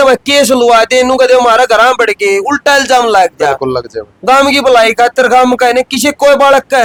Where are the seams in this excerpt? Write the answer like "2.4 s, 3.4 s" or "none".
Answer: none